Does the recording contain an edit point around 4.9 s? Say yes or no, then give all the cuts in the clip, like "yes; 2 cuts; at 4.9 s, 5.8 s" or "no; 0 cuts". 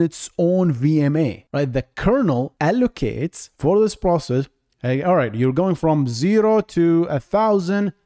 no; 2 cuts; at 1.4 s, 2.5 s